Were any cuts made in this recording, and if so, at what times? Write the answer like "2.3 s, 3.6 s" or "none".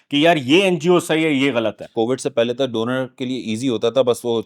1.9 s

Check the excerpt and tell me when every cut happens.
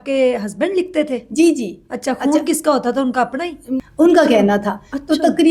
3.7 s

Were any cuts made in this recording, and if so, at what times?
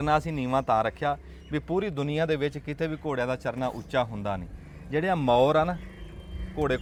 none

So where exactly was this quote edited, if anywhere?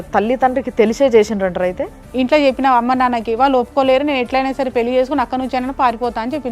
2.0 s

